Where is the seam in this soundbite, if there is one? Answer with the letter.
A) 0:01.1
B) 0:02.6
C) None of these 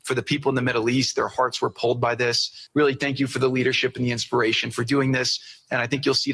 B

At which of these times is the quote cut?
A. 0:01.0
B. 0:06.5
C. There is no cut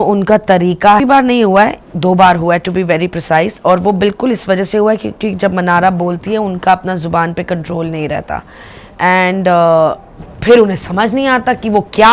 A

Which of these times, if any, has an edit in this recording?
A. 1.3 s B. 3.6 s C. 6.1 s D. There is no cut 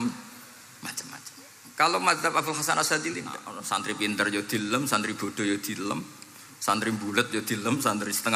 B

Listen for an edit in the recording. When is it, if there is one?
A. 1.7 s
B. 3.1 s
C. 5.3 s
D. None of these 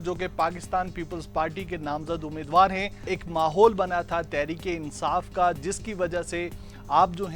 B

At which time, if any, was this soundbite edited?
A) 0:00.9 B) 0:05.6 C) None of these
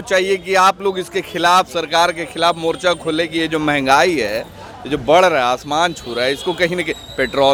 C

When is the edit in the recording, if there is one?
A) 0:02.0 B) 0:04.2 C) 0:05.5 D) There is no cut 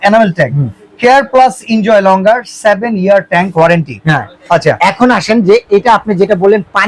D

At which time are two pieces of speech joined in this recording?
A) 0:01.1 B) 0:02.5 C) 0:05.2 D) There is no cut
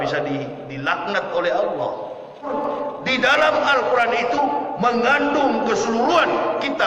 B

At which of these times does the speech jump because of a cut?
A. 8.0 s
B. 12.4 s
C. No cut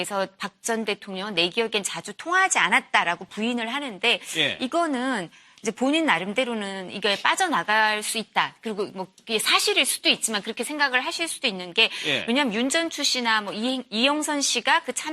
B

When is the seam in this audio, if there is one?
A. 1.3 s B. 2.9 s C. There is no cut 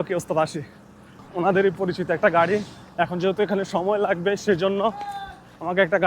A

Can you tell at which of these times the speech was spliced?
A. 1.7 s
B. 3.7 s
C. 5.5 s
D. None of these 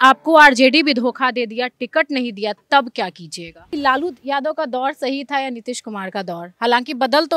B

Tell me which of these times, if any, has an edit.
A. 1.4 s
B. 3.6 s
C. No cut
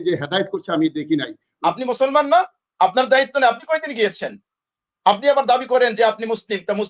A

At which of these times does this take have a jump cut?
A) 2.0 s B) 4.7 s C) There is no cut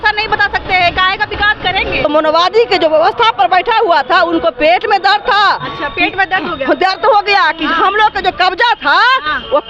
A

